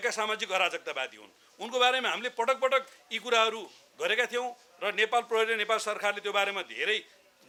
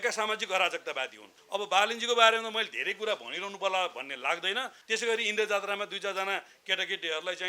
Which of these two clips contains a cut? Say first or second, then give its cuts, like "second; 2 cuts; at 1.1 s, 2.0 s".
second; 2 cuts; at 1.3 s, 4.8 s